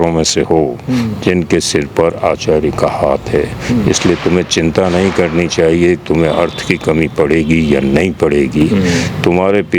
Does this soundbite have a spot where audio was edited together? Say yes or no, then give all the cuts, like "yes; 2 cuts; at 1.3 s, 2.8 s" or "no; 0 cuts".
no; 0 cuts